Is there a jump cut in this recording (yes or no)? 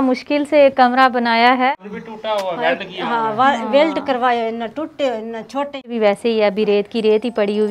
yes